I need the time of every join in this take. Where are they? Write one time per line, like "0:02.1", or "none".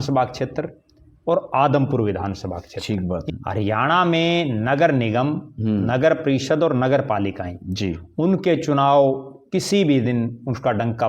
0:03.3